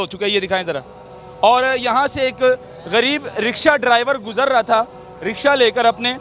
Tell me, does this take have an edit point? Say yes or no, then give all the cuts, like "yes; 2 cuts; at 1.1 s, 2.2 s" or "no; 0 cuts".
no; 0 cuts